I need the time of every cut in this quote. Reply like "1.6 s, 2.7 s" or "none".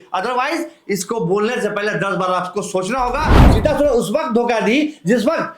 3.4 s